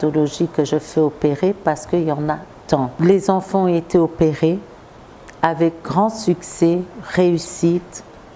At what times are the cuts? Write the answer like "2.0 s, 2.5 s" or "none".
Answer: 2.9 s